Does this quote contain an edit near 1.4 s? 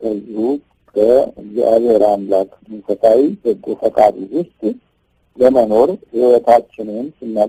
no; 0 cuts

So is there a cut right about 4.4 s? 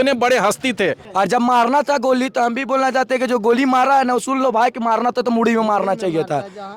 no; 1 cut; at 1.0 s

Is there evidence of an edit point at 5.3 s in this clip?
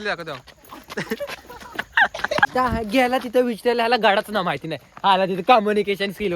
no; 1 cut; at 2.5 s

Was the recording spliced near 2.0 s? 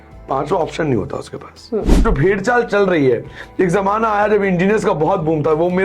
yes; 1 cut; at 2.0 s

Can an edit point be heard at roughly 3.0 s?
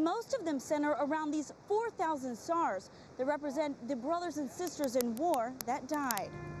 no; 0 cuts

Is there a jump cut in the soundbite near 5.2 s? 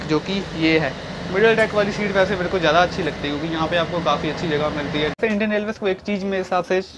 yes; 1 cut; at 5.2 s

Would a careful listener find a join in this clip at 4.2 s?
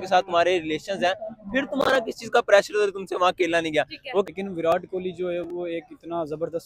yes; 1 cut; at 4.2 s

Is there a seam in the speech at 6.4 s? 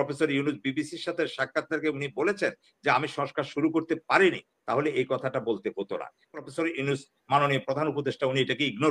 yes; 1 cut; at 6.4 s

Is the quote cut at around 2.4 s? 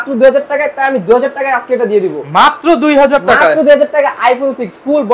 no; 0 cuts

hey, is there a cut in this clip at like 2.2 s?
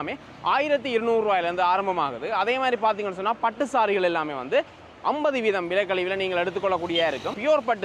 no; 0 cuts

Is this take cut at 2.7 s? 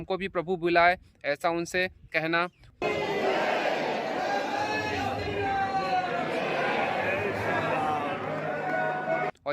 yes; 1 cut; at 2.7 s

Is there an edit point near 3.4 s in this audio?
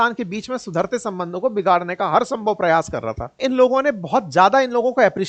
yes; 1 cut; at 3.4 s

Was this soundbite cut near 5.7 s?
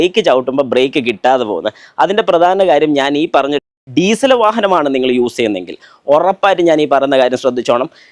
no; 1 cut; at 3.6 s

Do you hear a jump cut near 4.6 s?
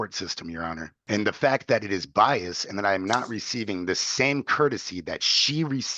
no; 1 cut; at 0.9 s

